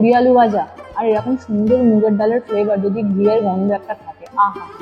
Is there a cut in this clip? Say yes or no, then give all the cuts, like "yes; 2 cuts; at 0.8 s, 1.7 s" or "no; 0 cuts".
no; 0 cuts